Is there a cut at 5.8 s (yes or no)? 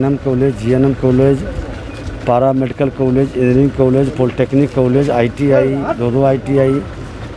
no